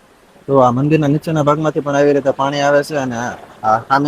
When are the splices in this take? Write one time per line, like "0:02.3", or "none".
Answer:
none